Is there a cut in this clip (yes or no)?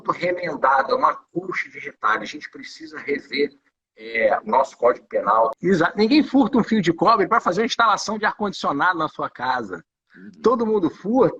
yes